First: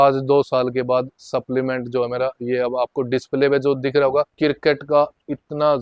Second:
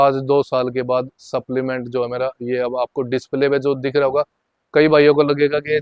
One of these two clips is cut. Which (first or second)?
first